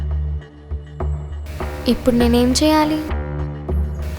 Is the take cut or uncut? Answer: cut